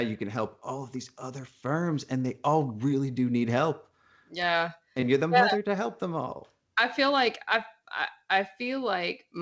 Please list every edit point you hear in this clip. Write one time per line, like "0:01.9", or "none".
none